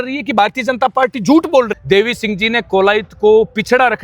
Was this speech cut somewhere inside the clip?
yes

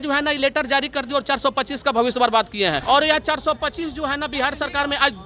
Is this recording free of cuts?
no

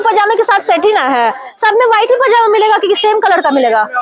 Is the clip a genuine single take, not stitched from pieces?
yes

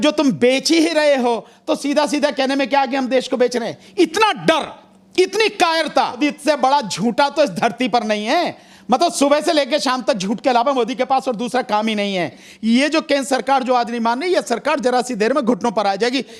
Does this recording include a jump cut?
yes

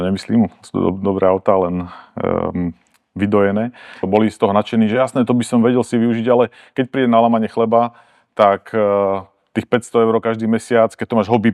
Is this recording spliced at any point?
yes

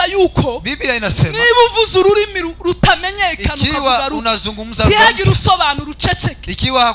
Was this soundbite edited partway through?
no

